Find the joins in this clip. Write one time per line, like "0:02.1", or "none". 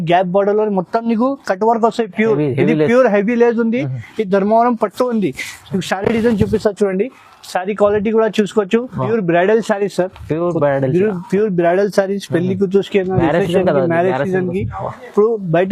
0:09.0

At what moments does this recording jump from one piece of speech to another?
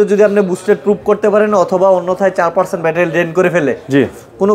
none

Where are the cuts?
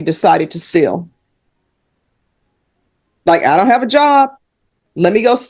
none

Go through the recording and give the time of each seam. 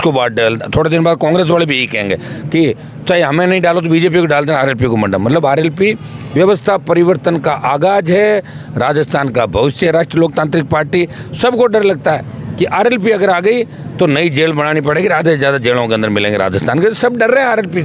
none

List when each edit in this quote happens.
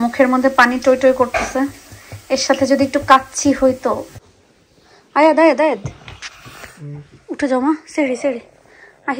0:04.2

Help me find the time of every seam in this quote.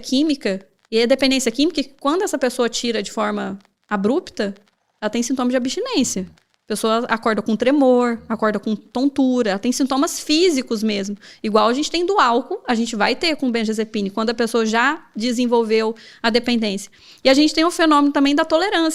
none

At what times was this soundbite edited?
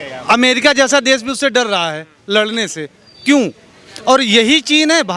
none

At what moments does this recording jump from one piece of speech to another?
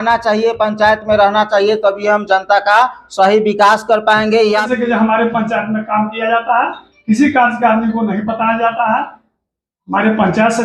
0:04.7

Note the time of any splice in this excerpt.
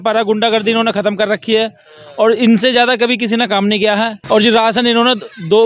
0:04.2

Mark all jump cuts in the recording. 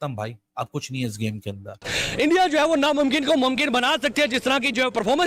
0:02.0

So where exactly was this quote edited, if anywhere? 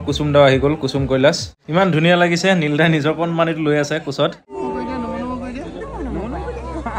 0:01.6
0:04.6

